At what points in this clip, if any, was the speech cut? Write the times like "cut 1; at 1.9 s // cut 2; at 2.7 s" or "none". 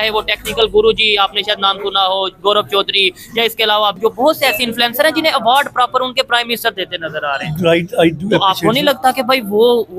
none